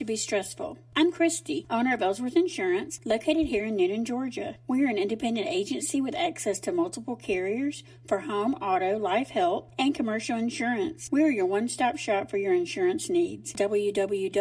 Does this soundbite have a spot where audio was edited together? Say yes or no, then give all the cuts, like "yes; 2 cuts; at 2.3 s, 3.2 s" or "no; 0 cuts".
no; 0 cuts